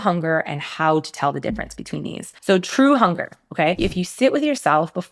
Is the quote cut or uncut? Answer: cut